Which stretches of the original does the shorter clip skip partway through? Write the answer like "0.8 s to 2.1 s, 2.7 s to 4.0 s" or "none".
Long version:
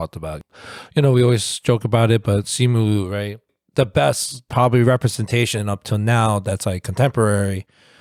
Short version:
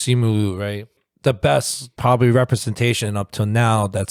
none